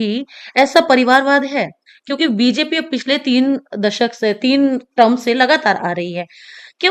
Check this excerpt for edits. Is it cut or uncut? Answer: uncut